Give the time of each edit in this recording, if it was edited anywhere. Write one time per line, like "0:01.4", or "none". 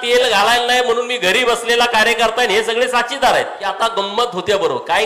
0:03.6